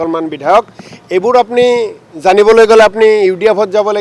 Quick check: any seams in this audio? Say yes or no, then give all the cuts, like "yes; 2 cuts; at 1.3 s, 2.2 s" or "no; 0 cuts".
no; 0 cuts